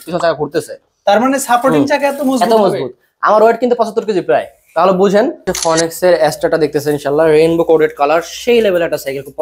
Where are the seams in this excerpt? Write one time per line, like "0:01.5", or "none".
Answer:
0:05.5